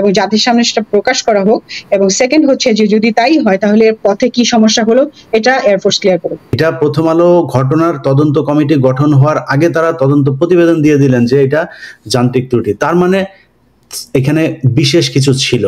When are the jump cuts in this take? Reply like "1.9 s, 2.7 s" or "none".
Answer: 6.4 s

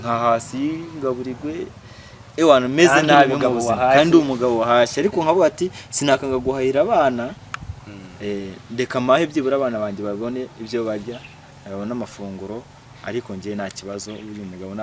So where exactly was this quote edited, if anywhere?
none

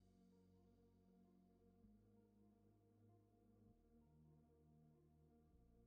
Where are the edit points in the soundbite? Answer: none

